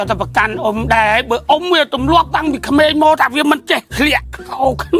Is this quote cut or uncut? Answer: uncut